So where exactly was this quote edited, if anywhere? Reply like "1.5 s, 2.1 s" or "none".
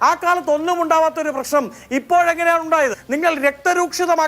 3.0 s